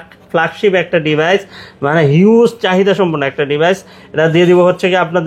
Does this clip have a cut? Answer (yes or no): no